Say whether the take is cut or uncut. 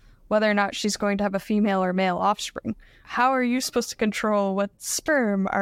cut